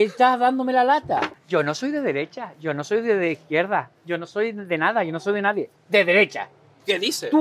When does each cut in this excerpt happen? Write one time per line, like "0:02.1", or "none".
0:01.4